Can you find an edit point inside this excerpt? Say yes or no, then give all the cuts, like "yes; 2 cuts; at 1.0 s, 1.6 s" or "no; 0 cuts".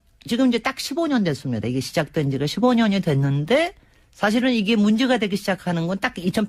yes; 1 cut; at 4.6 s